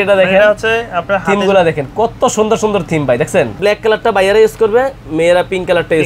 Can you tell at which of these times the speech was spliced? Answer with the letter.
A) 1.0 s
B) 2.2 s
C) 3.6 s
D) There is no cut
C